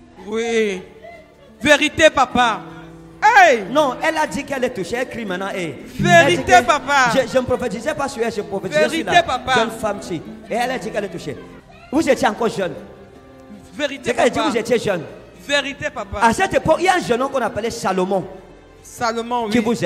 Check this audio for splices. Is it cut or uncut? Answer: cut